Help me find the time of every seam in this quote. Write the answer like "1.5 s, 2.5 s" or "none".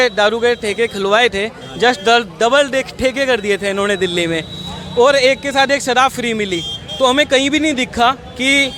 none